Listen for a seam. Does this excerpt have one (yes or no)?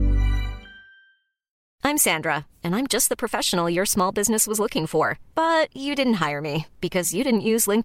yes